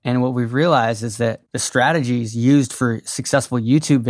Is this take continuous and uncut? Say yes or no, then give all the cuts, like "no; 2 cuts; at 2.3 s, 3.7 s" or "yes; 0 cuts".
no; 1 cut; at 1.4 s